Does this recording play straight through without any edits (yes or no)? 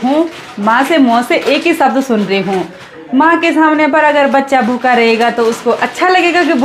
yes